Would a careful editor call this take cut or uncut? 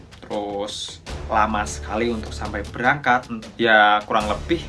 cut